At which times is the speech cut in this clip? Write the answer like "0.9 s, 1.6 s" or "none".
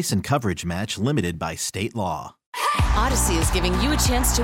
none